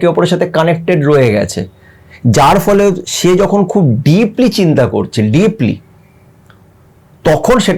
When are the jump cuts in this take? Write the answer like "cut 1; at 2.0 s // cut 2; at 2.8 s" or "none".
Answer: none